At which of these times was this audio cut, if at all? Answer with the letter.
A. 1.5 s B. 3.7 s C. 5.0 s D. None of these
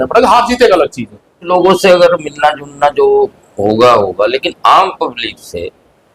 A